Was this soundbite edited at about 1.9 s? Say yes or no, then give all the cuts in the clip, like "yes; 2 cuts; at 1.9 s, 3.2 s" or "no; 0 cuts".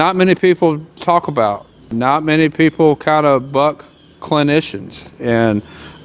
yes; 1 cut; at 1.9 s